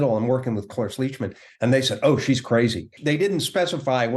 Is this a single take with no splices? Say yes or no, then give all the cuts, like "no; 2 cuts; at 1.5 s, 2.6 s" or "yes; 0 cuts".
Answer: no; 1 cut; at 2.9 s